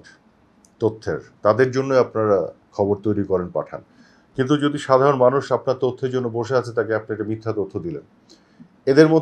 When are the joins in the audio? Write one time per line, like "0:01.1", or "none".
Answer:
none